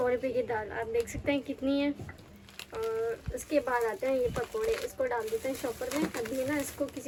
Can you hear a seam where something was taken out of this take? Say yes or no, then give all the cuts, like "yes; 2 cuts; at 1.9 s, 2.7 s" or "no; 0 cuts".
no; 0 cuts